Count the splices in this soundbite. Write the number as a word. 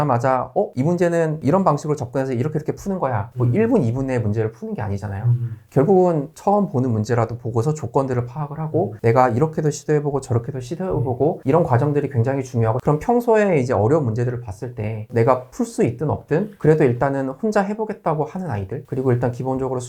two